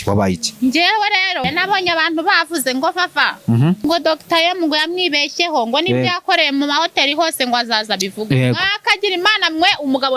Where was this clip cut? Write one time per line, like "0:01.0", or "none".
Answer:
0:01.4
0:03.8